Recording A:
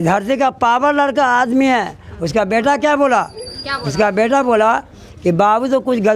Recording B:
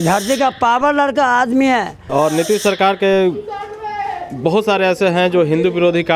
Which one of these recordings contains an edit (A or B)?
B